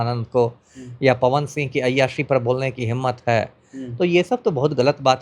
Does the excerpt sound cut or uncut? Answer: uncut